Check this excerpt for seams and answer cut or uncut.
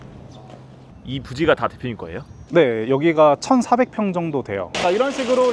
cut